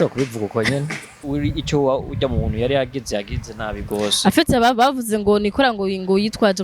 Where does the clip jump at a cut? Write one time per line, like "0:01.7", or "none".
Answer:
0:01.2